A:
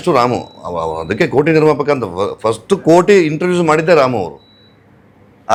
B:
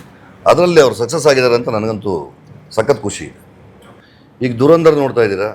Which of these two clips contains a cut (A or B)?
B